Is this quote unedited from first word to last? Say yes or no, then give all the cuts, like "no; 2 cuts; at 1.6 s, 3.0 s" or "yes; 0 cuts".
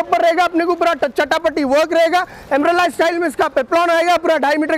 yes; 0 cuts